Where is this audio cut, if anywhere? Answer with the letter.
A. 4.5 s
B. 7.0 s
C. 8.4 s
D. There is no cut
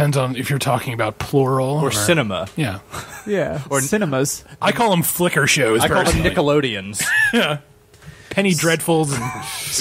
C